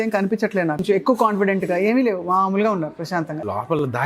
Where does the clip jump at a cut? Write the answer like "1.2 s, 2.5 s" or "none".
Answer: 0.8 s, 3.1 s

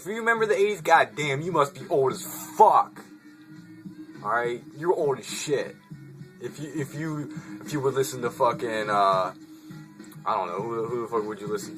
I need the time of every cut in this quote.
none

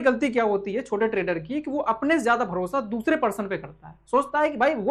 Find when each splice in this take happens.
none

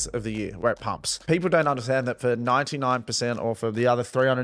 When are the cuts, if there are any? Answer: 1.1 s

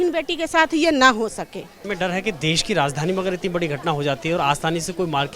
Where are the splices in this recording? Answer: 1.8 s

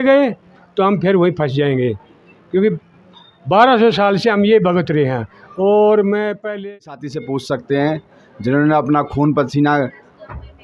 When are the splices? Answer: 6.5 s

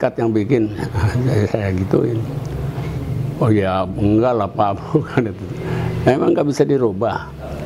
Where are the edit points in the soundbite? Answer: none

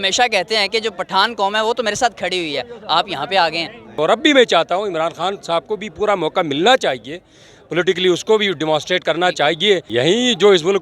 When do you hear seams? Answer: 4.0 s, 9.9 s

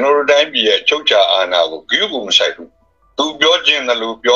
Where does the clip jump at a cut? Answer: none

